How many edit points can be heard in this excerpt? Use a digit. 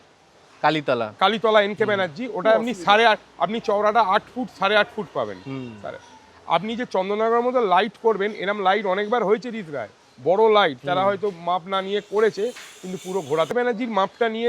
1